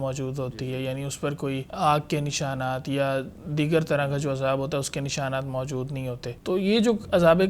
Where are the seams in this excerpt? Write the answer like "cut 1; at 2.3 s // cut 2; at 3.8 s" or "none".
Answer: cut 1; at 1.7 s // cut 2; at 6.3 s